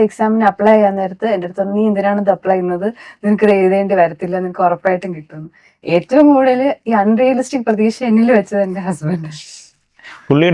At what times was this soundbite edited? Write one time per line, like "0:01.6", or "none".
none